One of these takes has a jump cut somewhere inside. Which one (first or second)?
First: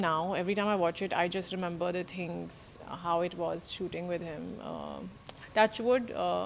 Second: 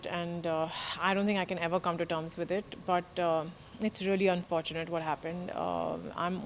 first